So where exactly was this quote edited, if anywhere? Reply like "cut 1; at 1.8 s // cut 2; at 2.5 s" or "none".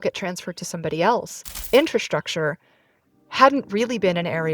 cut 1; at 1.6 s